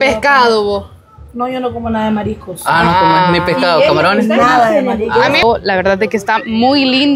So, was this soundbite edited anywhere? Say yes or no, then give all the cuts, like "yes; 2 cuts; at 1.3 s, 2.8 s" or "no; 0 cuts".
yes; 1 cut; at 5.4 s